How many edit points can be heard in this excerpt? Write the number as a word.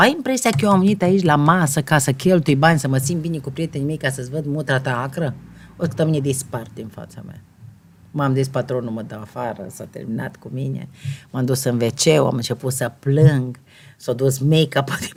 zero